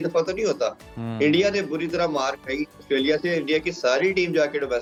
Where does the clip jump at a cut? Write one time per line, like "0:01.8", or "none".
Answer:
none